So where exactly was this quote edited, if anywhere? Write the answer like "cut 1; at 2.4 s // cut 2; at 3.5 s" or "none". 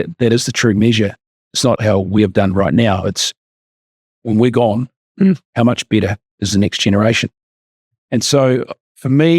cut 1; at 1.8 s